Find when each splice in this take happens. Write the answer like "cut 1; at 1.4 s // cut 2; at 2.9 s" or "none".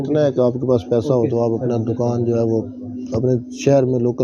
none